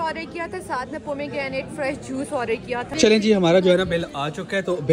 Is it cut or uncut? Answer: cut